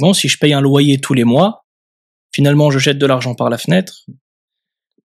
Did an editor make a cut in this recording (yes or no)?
no